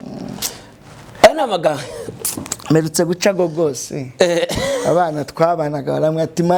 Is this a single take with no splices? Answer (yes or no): yes